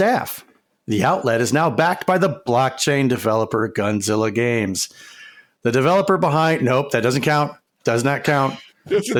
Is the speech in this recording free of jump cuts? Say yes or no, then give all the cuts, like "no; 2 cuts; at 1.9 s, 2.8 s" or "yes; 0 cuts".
yes; 0 cuts